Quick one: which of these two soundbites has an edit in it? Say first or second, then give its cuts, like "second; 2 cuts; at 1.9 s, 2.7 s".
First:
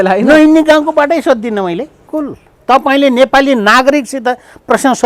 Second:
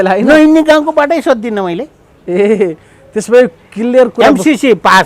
first; 1 cut; at 2.1 s